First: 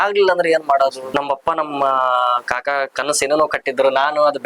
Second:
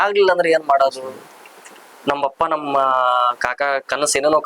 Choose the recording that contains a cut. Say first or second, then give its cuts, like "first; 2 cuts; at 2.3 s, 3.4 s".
first; 1 cut; at 1.0 s